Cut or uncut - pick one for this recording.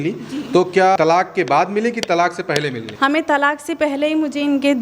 cut